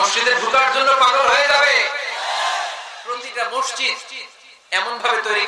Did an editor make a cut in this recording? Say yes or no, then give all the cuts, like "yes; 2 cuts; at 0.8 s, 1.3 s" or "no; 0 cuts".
yes; 1 cut; at 3.0 s